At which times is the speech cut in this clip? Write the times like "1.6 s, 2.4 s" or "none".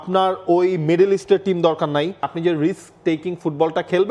2.3 s